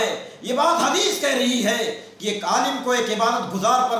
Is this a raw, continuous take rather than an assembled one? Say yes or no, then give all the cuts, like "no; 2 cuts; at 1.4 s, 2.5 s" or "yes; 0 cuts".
no; 1 cut; at 2.1 s